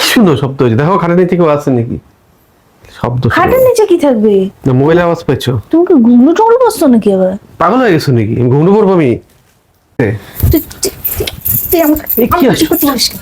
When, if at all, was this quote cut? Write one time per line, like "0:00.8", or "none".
0:09.9